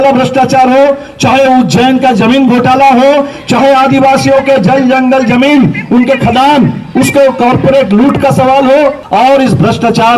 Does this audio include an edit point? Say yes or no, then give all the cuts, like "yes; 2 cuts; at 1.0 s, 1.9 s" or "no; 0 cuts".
yes; 1 cut; at 9.0 s